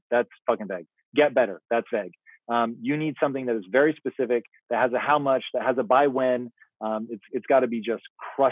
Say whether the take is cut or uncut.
uncut